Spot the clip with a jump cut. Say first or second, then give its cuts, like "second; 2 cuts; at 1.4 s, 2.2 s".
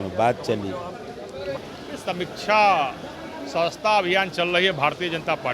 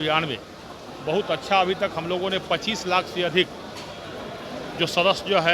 first; 1 cut; at 1.6 s